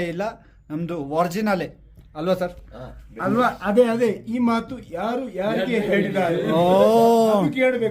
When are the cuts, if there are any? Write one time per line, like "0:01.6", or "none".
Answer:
none